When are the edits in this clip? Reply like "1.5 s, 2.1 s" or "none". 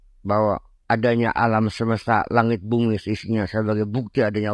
none